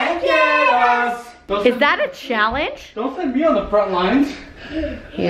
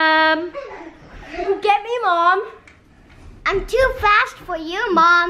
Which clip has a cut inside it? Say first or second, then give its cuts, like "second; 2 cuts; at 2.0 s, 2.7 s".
second; 1 cut; at 1.5 s